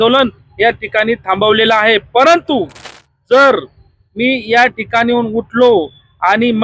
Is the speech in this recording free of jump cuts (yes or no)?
yes